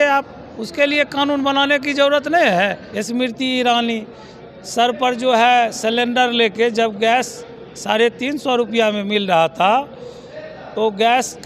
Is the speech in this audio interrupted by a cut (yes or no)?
yes